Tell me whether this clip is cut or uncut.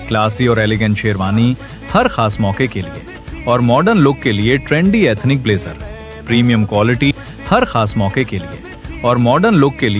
cut